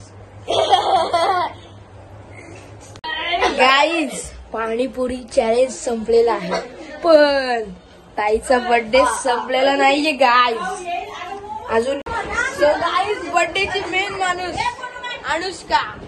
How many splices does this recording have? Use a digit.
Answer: 2